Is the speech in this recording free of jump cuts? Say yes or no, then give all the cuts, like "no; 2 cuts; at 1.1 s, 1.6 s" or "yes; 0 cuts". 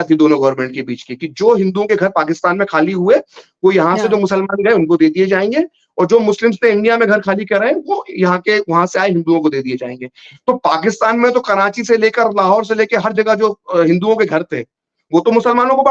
yes; 0 cuts